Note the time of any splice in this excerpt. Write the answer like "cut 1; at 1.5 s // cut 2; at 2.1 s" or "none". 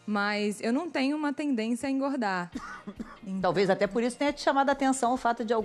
none